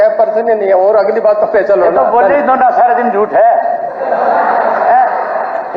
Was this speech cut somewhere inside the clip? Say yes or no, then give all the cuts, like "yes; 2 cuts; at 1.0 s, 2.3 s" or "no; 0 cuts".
no; 0 cuts